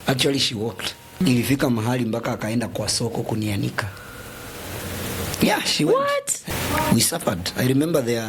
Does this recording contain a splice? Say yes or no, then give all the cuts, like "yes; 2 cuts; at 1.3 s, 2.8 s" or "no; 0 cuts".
yes; 2 cuts; at 1.2 s, 6.5 s